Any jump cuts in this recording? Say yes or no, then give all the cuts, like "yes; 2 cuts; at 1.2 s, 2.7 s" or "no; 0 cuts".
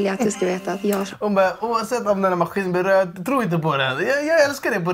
no; 0 cuts